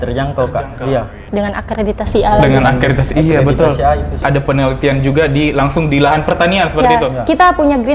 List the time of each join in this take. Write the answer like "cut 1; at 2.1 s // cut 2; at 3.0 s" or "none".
cut 1; at 1.2 s // cut 2; at 4.2 s

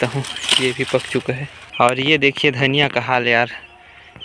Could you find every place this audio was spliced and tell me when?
cut 1; at 1.6 s

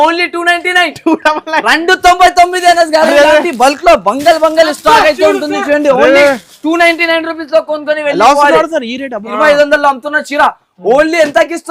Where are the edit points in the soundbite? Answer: cut 1; at 9.2 s

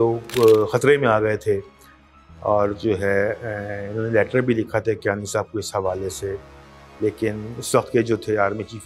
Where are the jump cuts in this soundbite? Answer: none

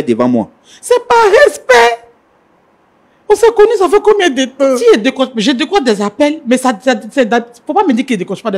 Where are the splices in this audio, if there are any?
cut 1; at 4.8 s

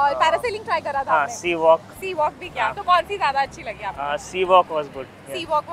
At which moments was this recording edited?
none

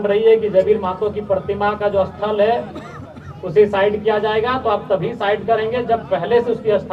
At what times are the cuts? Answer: none

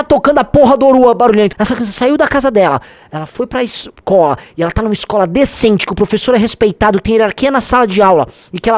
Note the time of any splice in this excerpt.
cut 1; at 1.6 s

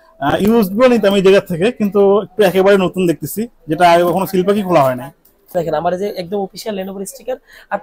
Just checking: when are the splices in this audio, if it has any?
cut 1; at 5.5 s

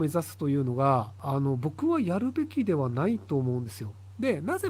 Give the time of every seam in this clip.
cut 1; at 1.2 s

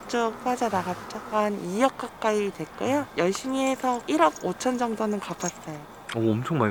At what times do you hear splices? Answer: none

